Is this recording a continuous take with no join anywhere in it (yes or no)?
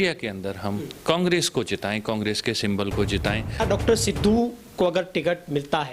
no